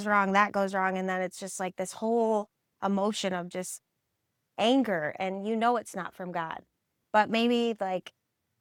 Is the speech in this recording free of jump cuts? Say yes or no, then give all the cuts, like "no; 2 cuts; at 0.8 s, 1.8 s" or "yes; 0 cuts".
yes; 0 cuts